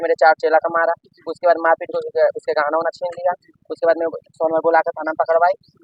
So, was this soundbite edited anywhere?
no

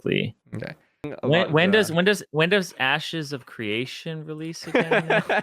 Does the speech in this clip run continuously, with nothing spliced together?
no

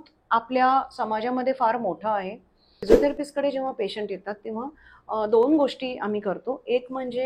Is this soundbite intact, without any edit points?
no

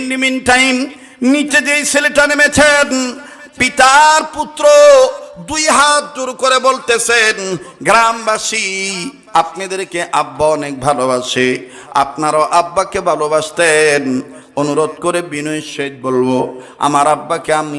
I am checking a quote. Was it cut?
no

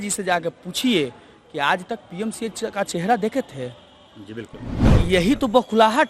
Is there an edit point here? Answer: yes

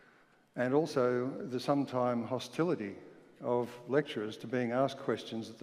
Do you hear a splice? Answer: yes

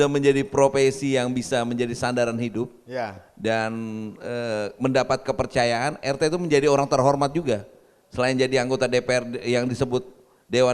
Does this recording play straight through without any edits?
yes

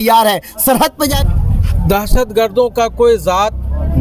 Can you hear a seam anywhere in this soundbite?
yes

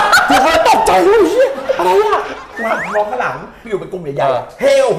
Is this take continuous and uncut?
no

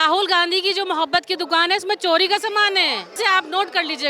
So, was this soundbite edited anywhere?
yes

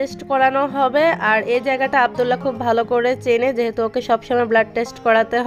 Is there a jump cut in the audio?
no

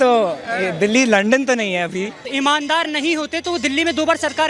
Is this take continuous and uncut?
no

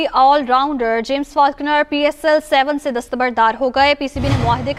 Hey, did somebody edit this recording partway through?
no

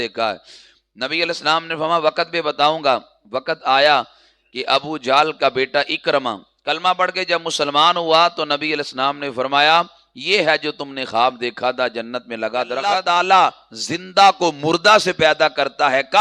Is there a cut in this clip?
yes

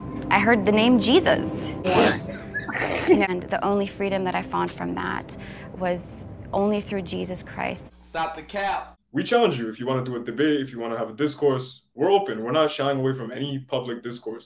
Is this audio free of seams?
no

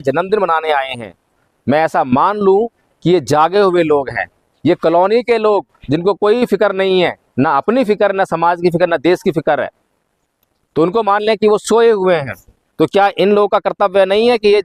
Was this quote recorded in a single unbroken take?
yes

